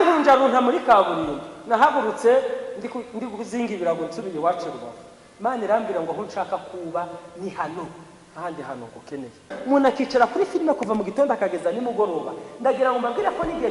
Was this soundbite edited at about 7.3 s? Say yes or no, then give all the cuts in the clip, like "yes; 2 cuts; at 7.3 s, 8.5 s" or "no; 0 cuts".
no; 1 cut; at 9.6 s